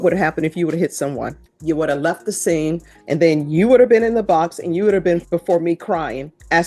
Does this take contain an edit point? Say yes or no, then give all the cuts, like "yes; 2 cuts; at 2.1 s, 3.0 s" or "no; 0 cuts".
yes; 3 cuts; at 1.5 s, 2.9 s, 5.2 s